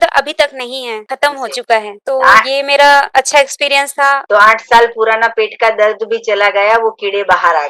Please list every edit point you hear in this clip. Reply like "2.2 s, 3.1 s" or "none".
1.0 s, 1.9 s, 3.1 s, 4.2 s